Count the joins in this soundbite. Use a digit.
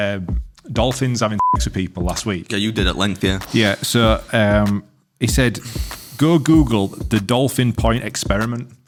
0